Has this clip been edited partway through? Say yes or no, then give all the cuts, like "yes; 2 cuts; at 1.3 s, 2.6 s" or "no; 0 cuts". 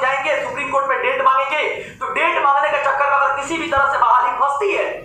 no; 0 cuts